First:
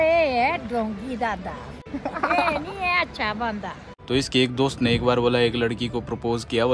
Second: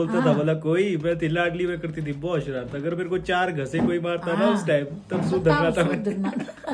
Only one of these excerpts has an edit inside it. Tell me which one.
first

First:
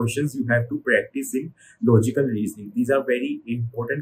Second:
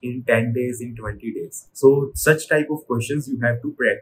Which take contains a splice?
second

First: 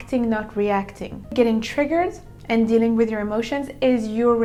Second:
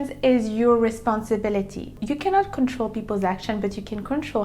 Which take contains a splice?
second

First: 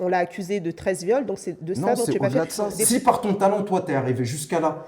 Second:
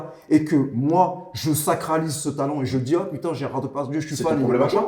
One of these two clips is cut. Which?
first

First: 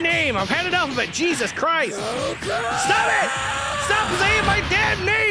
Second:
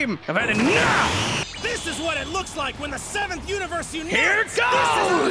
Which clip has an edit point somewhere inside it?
second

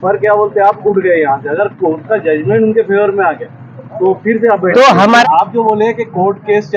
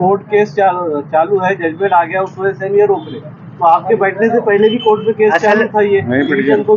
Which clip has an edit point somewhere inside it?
first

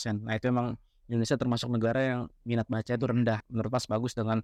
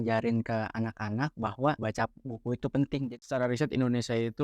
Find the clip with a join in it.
second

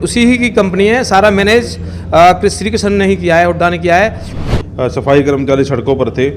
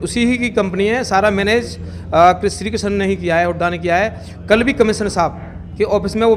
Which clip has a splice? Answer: first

